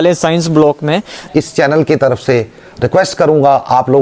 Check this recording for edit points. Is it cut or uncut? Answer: cut